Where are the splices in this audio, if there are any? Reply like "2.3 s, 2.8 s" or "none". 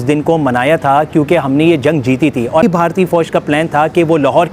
2.6 s